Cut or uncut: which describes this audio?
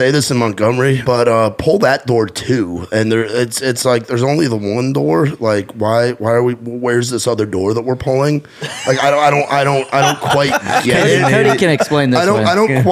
cut